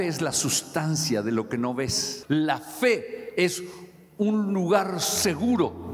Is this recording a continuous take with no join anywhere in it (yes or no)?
no